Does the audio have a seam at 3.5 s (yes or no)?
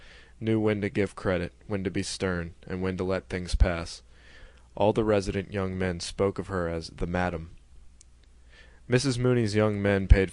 no